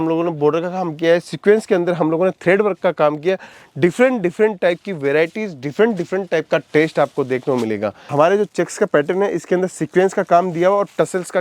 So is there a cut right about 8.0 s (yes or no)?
yes